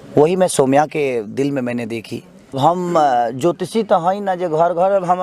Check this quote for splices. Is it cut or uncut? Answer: cut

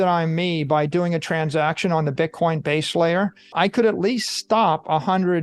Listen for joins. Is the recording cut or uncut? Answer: cut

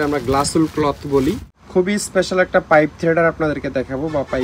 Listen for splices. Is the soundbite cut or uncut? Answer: cut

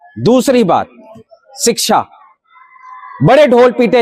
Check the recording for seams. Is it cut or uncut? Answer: uncut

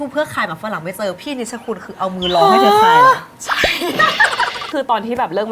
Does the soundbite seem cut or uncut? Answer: cut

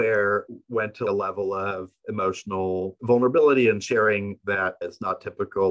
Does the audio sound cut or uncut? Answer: cut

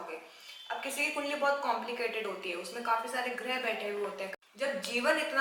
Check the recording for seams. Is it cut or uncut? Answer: cut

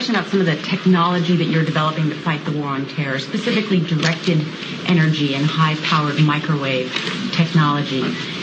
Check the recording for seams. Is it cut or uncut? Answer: uncut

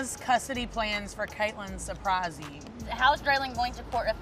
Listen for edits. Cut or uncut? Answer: cut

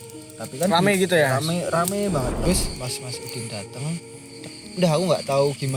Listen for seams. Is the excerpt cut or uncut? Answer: cut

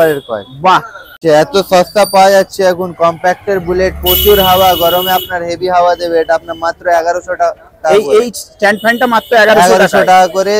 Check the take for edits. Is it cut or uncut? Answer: cut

